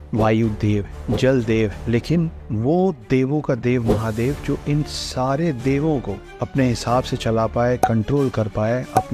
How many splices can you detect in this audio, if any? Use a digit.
0